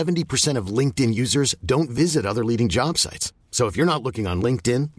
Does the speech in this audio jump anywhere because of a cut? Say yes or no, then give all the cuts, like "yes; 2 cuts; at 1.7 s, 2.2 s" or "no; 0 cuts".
no; 0 cuts